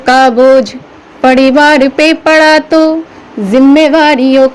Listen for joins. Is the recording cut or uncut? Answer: uncut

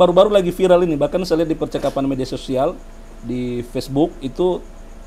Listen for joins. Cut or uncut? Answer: uncut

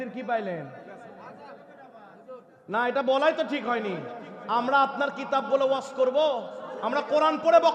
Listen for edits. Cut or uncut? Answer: uncut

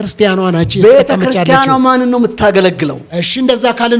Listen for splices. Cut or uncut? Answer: cut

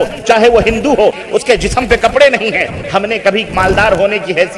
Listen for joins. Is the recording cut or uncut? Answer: cut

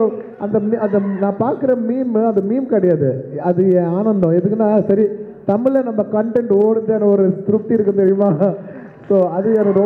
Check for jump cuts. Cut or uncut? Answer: uncut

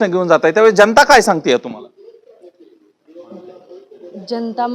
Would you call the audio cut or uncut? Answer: uncut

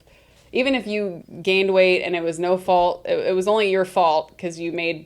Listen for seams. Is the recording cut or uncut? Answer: cut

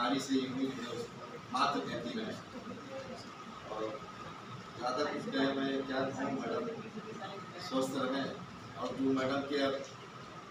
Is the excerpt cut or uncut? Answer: uncut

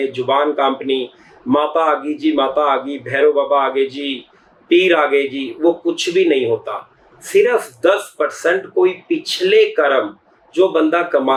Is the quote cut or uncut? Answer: uncut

